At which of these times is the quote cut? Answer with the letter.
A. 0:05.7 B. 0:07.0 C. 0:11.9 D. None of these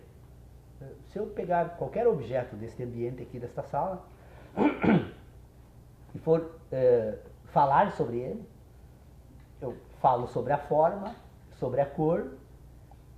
C